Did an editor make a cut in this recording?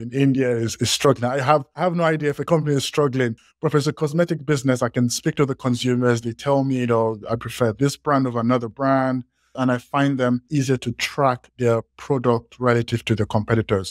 yes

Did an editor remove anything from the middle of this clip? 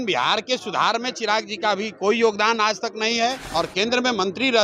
yes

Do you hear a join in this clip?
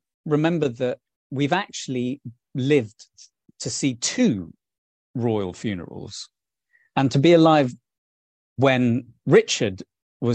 no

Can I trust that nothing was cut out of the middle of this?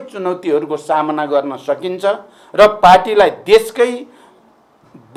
yes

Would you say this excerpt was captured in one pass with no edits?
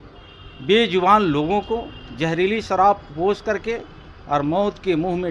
yes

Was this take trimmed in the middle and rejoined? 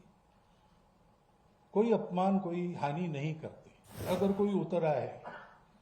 yes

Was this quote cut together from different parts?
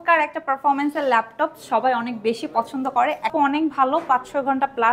yes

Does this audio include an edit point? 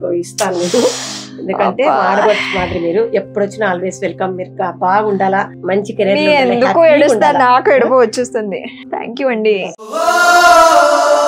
no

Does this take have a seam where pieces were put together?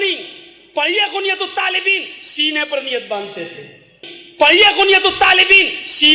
no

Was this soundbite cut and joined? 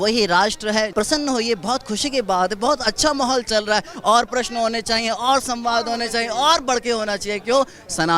yes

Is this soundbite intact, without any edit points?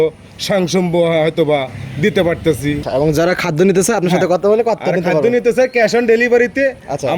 no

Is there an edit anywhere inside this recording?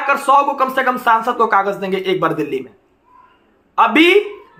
no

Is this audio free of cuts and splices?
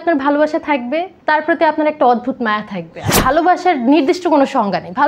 no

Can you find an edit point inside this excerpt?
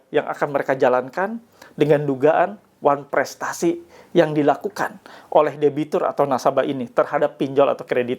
no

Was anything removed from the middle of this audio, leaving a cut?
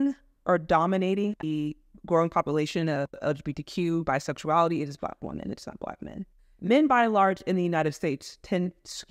yes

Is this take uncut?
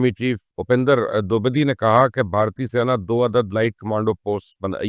yes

